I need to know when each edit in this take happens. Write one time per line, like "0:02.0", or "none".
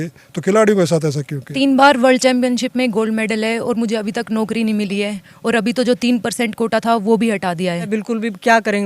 0:01.5
0:07.9